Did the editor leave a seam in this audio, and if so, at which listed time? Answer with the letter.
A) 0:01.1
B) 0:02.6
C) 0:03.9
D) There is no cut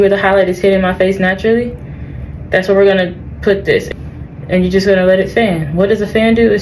C